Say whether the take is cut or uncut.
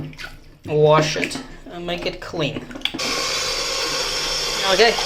uncut